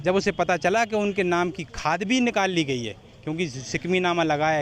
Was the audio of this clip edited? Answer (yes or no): no